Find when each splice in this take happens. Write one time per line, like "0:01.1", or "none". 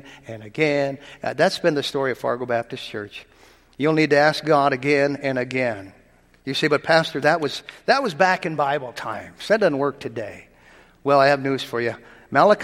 none

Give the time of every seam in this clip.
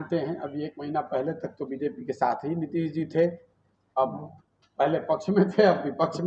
none

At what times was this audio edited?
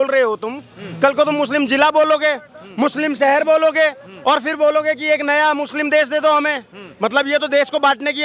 none

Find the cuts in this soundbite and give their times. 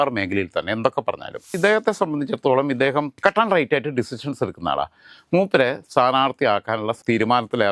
0:01.6

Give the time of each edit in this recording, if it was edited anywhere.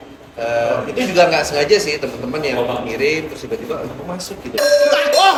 none

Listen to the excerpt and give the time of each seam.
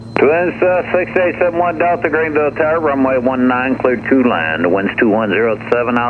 none

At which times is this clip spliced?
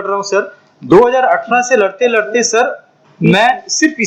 none

